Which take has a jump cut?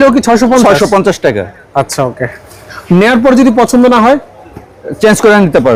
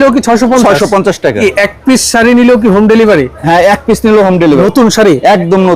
second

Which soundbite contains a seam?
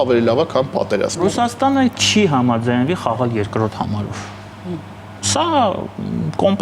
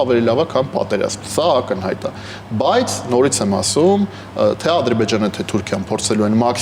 first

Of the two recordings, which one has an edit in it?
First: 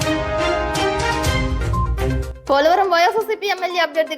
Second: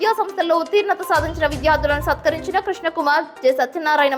first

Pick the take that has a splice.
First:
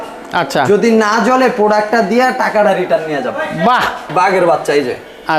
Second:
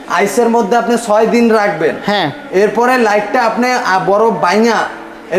first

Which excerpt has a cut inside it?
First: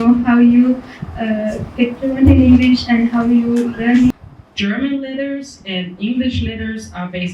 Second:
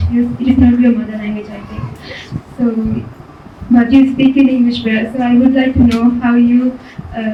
first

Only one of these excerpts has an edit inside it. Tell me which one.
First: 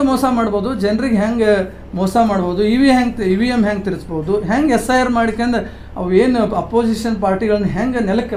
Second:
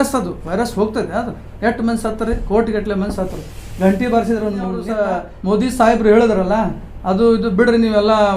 second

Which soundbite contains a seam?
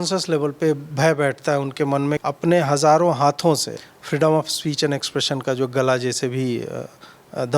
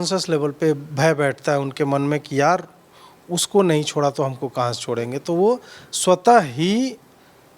first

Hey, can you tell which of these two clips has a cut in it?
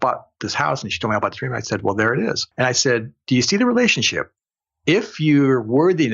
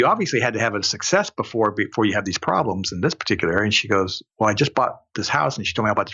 first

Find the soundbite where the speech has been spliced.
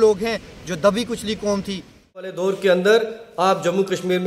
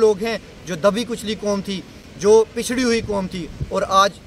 first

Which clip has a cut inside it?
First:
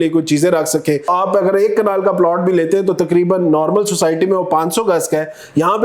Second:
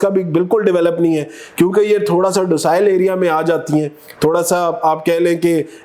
first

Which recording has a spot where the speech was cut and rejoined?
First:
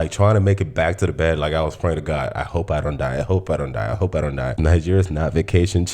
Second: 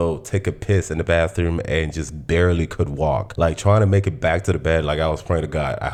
first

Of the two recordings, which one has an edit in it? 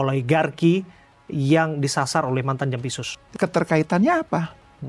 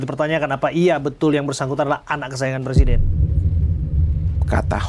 first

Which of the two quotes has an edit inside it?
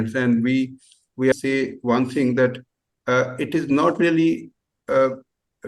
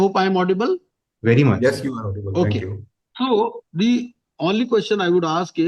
first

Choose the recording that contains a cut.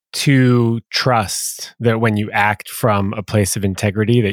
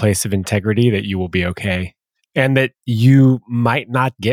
second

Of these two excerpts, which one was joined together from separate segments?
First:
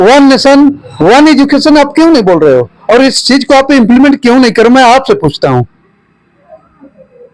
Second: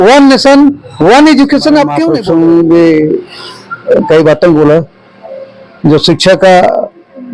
second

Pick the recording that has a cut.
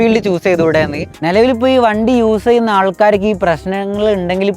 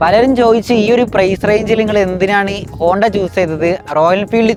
first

